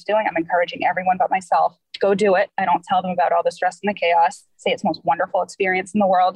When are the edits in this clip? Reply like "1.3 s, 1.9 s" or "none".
none